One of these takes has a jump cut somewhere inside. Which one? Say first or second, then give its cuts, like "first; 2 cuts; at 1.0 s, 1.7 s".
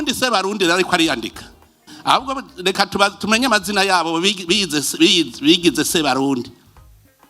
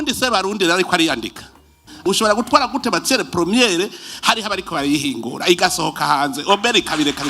second; 1 cut; at 2.0 s